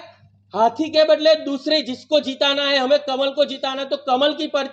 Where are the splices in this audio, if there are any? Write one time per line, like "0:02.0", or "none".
none